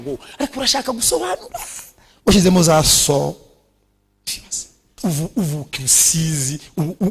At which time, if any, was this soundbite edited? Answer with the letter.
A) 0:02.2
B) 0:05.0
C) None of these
B